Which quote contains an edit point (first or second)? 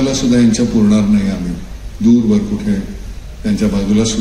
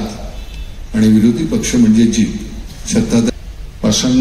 second